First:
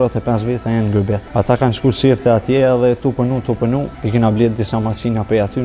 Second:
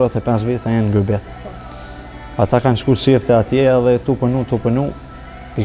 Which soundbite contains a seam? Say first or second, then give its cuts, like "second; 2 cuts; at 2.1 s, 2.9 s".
first; 2 cuts; at 1.2 s, 4.0 s